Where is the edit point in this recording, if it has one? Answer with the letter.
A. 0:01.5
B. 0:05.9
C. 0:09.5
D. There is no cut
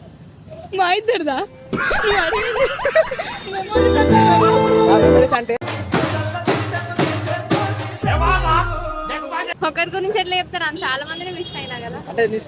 C